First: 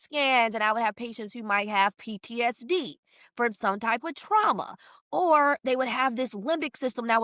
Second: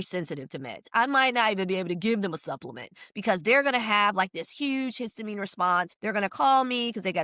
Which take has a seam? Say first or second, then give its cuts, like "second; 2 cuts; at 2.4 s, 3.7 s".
second; 1 cut; at 5.9 s